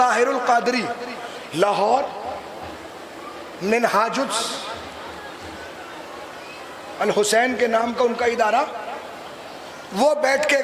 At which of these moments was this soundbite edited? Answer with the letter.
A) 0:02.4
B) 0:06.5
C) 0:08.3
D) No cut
D